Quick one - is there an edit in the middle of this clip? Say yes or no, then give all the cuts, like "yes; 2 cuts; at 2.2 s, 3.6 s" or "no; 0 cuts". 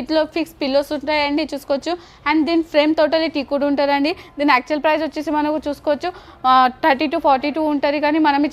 no; 0 cuts